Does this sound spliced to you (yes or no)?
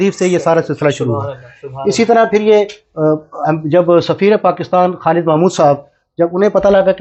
no